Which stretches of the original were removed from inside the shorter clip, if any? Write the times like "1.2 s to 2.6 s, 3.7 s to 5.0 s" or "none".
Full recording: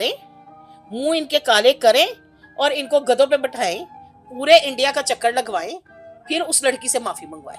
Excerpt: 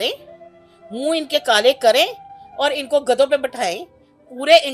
none